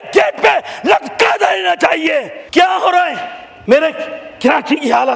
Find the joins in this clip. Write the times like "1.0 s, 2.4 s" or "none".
2.4 s